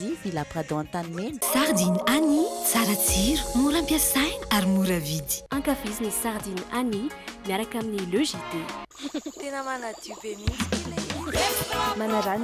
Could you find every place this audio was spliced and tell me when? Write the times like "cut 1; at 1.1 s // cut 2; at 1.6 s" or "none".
cut 1; at 1.3 s